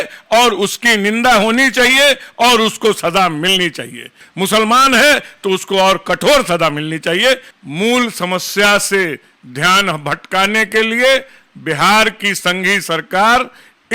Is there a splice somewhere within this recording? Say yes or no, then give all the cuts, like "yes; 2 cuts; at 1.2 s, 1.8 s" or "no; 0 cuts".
yes; 2 cuts; at 4.2 s, 7.5 s